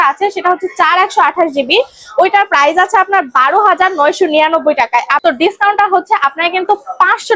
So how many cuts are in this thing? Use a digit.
1